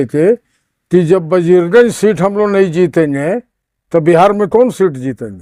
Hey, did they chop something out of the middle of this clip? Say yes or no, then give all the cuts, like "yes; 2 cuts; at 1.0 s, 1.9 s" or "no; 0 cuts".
no; 0 cuts